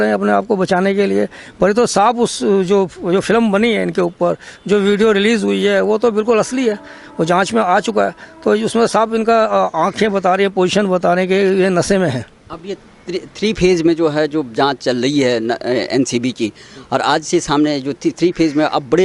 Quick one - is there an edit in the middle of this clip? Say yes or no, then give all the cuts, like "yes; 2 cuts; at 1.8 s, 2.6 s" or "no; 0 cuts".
no; 0 cuts